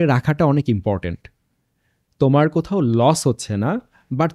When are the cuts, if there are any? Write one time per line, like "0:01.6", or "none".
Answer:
none